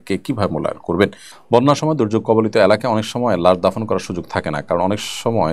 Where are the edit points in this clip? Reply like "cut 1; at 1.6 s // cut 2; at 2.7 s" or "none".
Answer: cut 1; at 1.3 s